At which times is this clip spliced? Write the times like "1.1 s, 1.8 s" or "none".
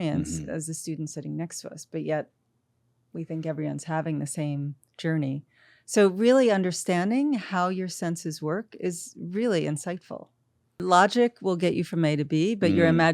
10.8 s